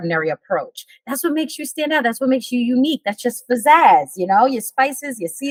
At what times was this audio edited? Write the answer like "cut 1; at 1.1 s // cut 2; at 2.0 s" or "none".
none